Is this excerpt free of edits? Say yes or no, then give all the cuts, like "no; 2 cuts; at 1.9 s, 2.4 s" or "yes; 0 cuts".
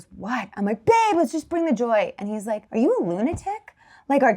no; 1 cut; at 2.6 s